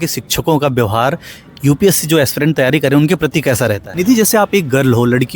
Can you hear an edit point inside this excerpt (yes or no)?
yes